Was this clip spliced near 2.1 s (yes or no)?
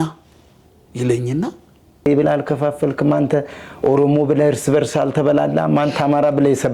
yes